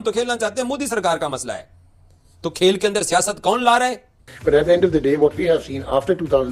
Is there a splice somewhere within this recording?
yes; 1 cut; at 4.1 s

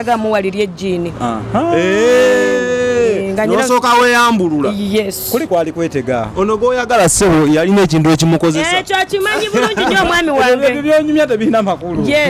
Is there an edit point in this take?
no; 0 cuts

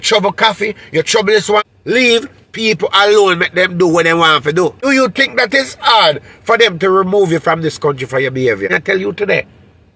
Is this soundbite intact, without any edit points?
no; 3 cuts; at 1.7 s, 4.8 s, 8.7 s

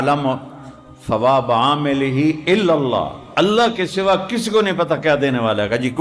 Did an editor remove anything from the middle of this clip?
no; 0 cuts

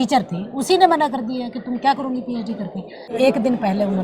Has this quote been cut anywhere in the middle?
yes; 1 cut; at 3.1 s

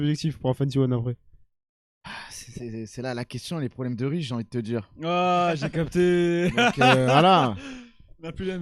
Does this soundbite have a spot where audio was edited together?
no; 0 cuts

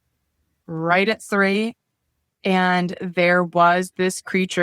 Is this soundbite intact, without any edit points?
yes; 0 cuts

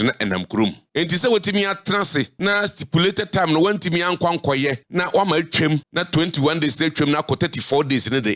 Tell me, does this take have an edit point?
yes; 4 cuts; at 0.8 s, 2.3 s, 4.8 s, 5.9 s

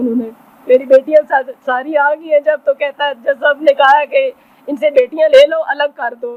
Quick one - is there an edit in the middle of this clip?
no; 0 cuts

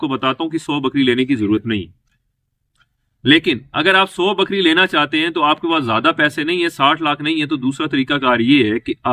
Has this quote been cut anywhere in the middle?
no; 0 cuts

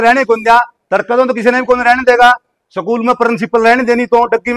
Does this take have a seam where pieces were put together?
no; 0 cuts

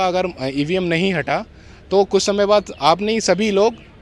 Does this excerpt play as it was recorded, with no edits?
yes; 0 cuts

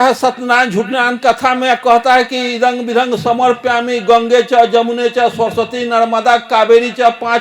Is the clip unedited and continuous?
yes; 0 cuts

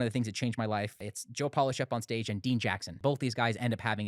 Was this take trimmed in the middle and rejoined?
yes; 2 cuts; at 1.2 s, 3.0 s

